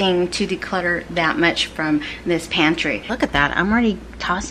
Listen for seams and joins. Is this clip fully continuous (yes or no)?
no